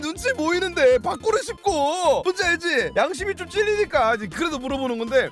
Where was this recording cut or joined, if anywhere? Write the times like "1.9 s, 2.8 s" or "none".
none